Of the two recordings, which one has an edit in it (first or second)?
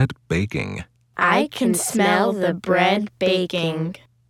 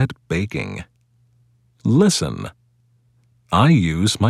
second